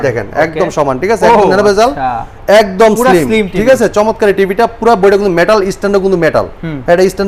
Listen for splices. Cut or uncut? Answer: uncut